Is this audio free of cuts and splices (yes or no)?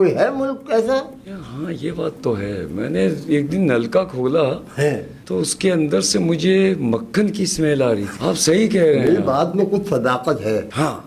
yes